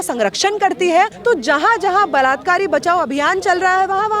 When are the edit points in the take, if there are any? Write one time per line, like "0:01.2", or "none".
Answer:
0:01.1